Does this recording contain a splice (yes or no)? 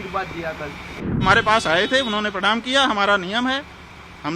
yes